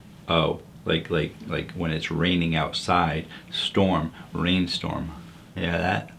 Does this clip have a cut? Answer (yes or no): no